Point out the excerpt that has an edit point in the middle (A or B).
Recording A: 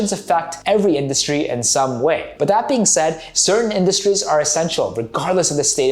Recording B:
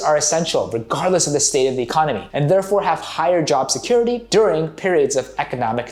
A